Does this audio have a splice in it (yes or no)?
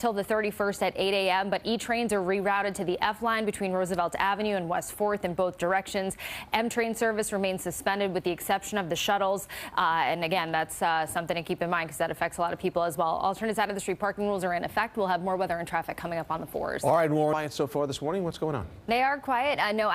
yes